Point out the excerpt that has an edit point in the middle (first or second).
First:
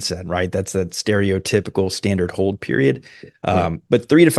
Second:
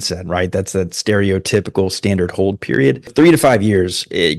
second